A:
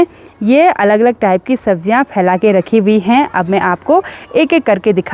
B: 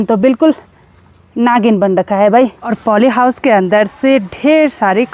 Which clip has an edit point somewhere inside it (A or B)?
B